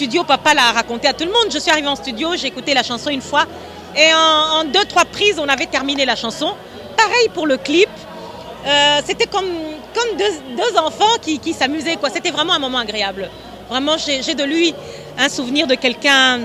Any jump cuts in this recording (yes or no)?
no